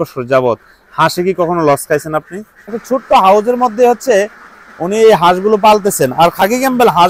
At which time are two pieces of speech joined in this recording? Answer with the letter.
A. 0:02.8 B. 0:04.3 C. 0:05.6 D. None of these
A